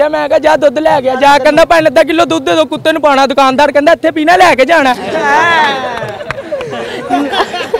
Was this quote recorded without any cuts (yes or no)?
yes